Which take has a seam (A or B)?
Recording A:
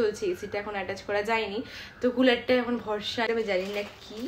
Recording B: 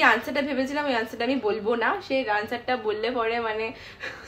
A